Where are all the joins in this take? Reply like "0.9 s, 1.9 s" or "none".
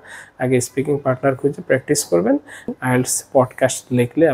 2.7 s